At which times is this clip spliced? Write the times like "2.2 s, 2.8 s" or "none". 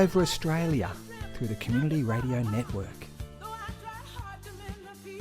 2.8 s

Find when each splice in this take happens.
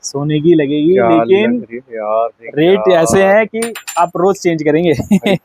none

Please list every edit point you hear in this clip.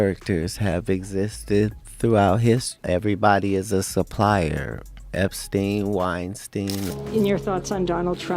6.9 s

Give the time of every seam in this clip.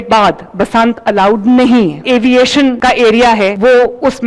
2.0 s

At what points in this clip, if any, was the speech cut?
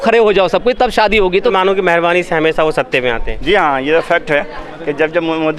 1.5 s

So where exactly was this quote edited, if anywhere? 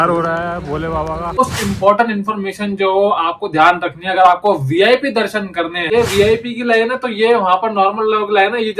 1.4 s, 5.9 s

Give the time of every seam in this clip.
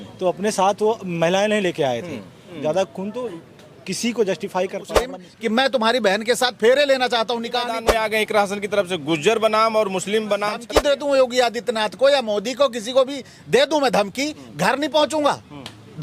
2.4 s, 5.2 s, 7.8 s, 10.7 s

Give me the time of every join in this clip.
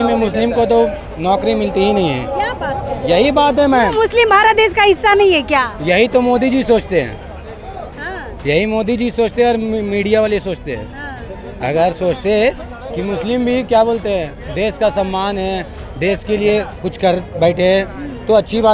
none

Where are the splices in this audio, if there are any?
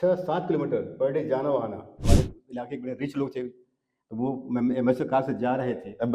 1.9 s

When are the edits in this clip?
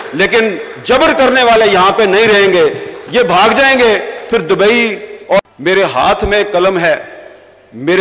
5.1 s

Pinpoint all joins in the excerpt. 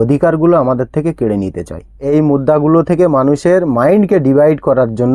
2.0 s

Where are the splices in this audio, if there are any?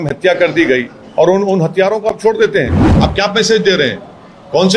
2.8 s

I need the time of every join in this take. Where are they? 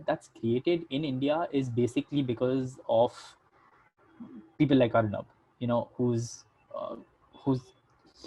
none

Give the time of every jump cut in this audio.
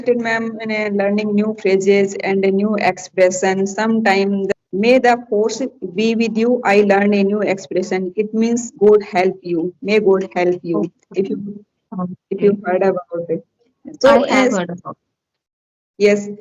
4.5 s

